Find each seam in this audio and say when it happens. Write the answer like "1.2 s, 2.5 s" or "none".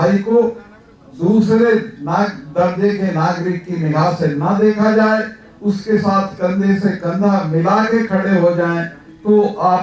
none